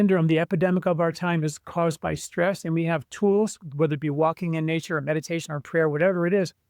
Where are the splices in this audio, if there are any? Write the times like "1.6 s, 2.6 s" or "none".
none